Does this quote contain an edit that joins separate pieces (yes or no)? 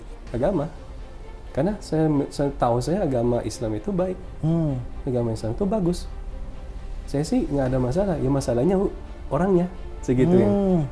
no